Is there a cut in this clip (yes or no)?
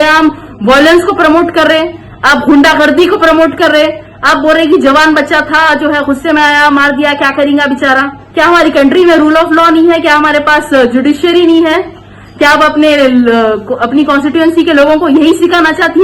yes